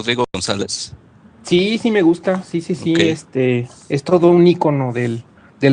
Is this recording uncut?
no; 1 cut; at 2.0 s

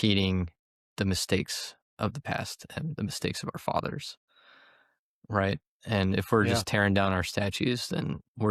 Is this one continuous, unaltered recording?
yes; 0 cuts

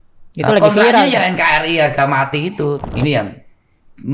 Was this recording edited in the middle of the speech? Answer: yes; 1 cut; at 2.8 s

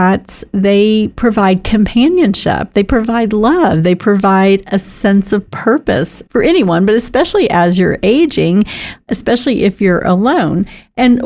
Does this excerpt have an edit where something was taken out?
no; 0 cuts

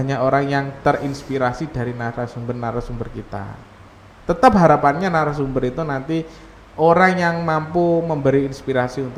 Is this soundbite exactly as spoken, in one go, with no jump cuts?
yes; 0 cuts

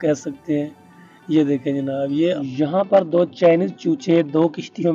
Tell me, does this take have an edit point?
yes; 1 cut; at 2.4 s

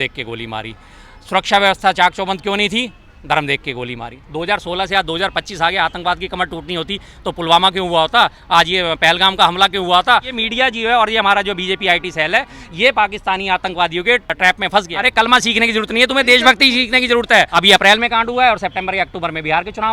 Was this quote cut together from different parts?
yes; 4 cuts; at 4.2 s, 10.3 s, 14.8 s, 17.5 s

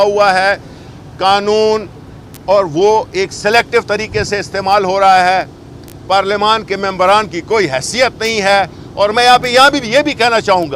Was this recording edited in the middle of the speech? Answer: no; 0 cuts

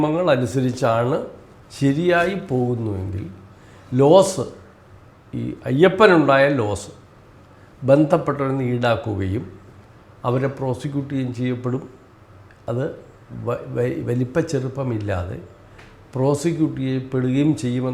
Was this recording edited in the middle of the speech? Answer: no; 0 cuts

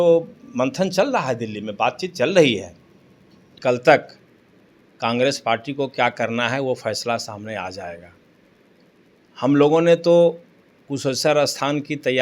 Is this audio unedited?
no; 1 cut; at 3.5 s

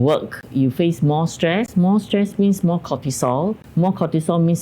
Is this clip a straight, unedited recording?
no; 1 cut; at 3.6 s

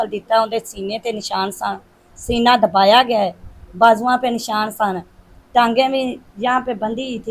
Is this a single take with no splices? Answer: yes; 0 cuts

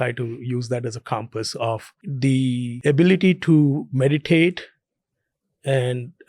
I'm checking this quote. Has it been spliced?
yes; 2 cuts; at 2.0 s, 2.7 s

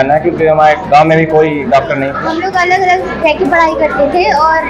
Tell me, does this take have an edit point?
yes; 1 cut; at 2.2 s

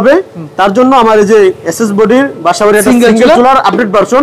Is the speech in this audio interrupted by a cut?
no; 0 cuts

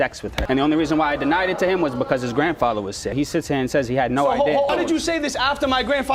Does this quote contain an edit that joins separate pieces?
no; 0 cuts

